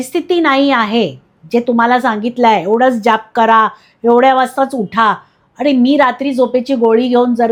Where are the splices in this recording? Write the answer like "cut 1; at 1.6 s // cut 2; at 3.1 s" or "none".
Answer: none